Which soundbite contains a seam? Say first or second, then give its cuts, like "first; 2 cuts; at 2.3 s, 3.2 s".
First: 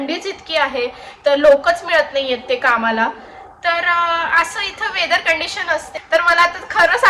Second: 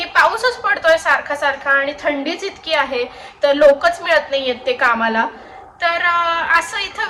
first; 1 cut; at 5.9 s